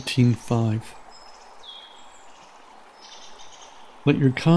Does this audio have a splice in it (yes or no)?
no